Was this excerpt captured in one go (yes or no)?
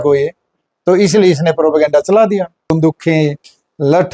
no